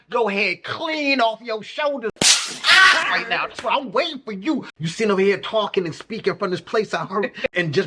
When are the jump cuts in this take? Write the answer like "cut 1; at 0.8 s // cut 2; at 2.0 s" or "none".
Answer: cut 1; at 2.1 s // cut 2; at 4.8 s